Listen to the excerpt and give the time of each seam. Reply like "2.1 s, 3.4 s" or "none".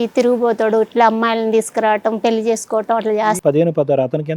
3.4 s